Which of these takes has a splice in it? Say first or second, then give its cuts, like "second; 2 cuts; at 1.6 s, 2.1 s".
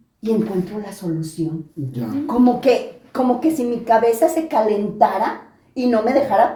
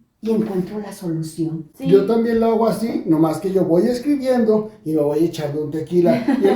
second; 1 cut; at 1.7 s